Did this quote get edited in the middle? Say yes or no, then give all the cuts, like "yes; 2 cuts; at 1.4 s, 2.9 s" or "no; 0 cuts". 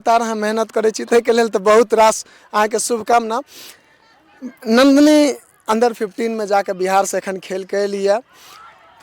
no; 0 cuts